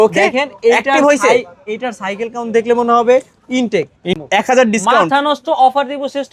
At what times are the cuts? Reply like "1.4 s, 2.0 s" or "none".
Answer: 4.1 s